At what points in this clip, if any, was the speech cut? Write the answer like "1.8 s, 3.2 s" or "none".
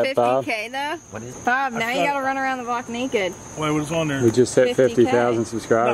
none